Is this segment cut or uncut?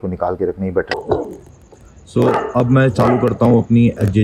cut